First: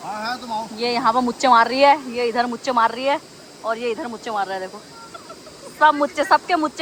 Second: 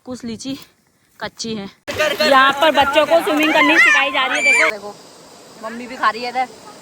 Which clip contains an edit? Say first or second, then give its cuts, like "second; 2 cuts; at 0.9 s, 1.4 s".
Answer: second; 2 cuts; at 1.8 s, 4.7 s